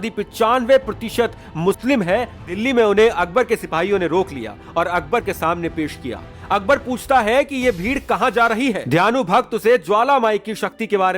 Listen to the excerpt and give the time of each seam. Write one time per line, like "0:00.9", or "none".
0:02.5